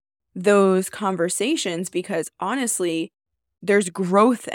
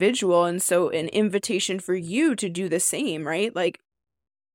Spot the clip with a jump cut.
first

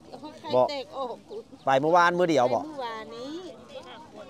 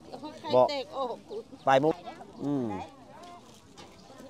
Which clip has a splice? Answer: second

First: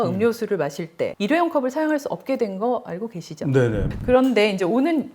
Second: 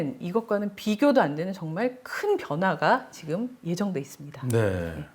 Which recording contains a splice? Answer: first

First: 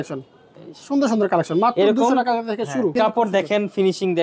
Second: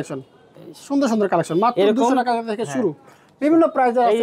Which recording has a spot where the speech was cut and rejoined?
first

